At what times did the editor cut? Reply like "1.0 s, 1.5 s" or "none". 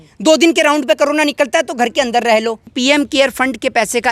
2.7 s